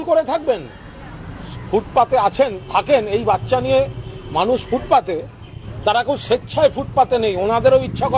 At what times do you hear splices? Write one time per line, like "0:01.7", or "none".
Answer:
0:01.5